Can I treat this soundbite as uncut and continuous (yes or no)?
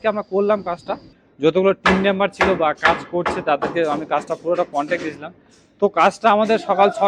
no